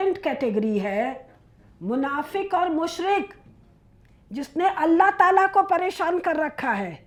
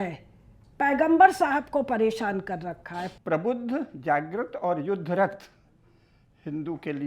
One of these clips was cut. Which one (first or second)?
second